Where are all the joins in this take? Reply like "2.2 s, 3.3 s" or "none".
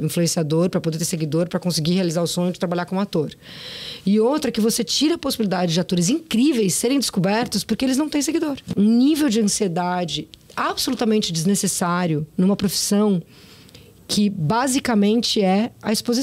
8.8 s